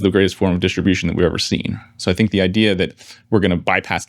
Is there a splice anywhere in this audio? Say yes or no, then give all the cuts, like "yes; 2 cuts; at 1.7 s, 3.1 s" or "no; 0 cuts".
yes; 1 cut; at 2.0 s